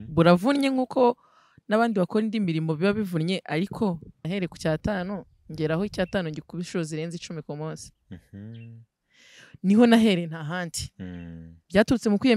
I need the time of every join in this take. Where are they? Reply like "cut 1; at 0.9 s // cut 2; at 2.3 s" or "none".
cut 1; at 4.2 s